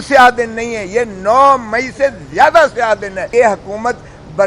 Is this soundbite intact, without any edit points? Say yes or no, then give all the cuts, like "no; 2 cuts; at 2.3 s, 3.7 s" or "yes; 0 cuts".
no; 1 cut; at 3.2 s